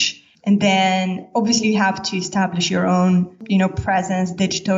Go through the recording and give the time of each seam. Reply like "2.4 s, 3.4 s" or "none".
3.4 s

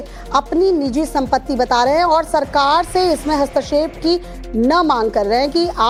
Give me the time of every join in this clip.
none

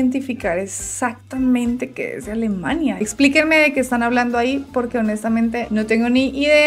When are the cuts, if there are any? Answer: 3.0 s

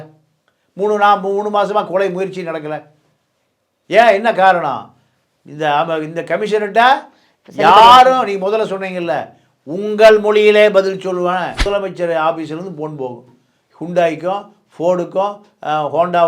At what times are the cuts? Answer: 11.6 s

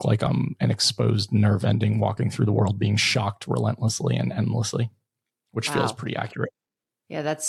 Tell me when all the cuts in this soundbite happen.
none

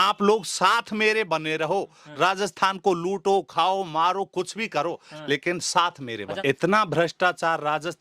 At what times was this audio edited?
6.4 s

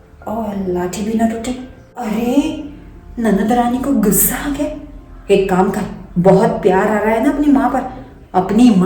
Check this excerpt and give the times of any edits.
2.3 s

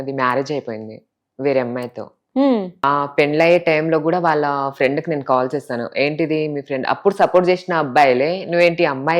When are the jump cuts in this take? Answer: 2.8 s

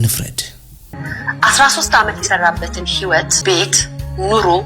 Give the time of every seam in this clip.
0.8 s, 3.3 s

